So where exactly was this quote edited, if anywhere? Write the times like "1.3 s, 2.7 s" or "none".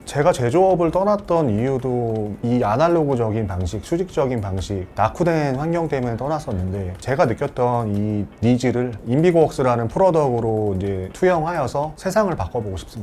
2.3 s, 6.9 s